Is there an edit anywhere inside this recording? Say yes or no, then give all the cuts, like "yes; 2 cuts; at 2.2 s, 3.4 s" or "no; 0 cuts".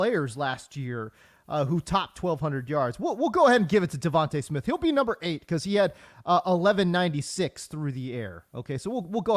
no; 0 cuts